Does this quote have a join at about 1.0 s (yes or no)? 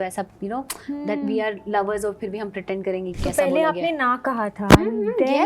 no